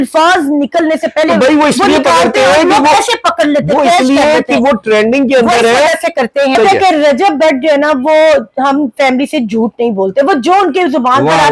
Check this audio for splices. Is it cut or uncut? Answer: cut